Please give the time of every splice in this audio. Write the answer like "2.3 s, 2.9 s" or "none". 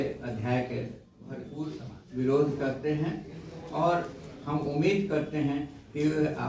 1.5 s